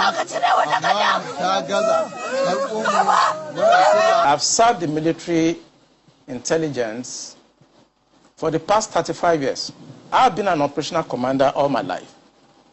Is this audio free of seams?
no; 2 cuts; at 4.2 s, 10.0 s

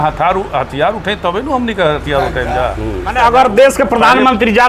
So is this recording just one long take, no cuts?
no; 1 cut; at 3.1 s

